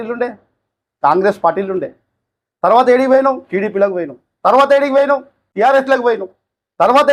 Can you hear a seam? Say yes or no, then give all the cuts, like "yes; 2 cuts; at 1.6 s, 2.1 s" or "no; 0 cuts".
no; 0 cuts